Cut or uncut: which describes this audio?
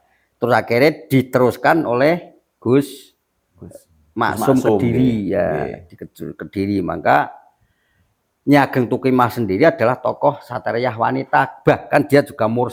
uncut